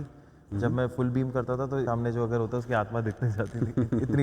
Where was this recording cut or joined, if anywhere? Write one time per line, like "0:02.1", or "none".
0:01.9